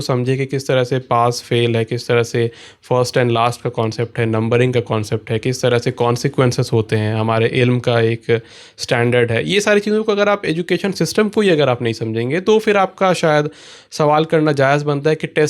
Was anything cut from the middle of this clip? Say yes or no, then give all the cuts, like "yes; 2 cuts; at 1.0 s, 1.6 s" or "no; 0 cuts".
no; 0 cuts